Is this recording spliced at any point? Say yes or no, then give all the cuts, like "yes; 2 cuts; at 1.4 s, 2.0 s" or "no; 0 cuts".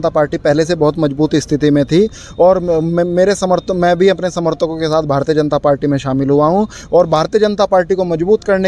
no; 0 cuts